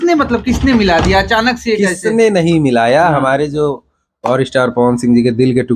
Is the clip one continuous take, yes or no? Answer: yes